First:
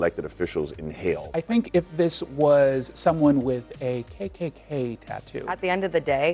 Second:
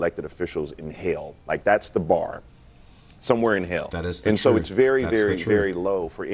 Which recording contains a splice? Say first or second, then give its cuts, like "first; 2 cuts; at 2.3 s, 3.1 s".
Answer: first; 2 cuts; at 1.3 s, 5.5 s